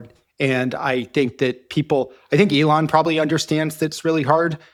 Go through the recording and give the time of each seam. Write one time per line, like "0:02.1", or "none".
none